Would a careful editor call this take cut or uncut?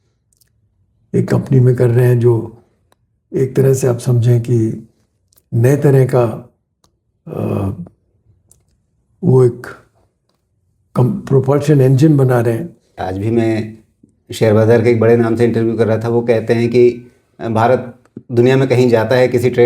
cut